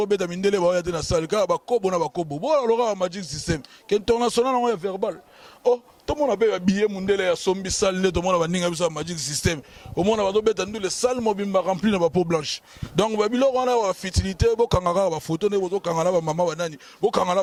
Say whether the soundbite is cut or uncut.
uncut